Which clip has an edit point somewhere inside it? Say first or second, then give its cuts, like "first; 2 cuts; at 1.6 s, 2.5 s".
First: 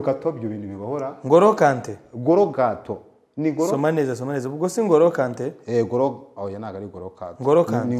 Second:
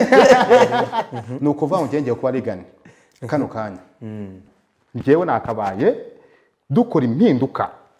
second; 1 cut; at 1.0 s